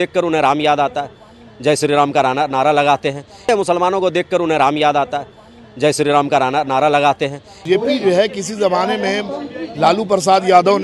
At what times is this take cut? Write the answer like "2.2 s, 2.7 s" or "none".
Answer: 3.4 s, 7.6 s